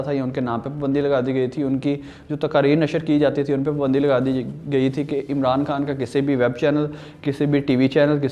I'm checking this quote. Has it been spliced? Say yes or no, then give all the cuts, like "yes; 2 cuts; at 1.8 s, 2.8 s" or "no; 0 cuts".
no; 0 cuts